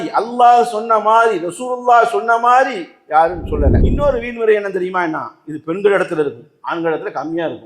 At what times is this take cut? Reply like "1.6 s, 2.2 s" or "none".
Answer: 3.8 s